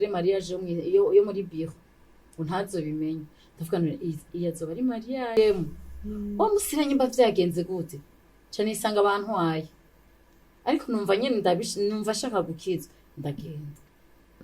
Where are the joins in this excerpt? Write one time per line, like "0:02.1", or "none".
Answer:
0:05.3